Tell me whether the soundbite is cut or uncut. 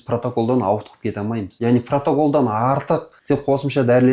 cut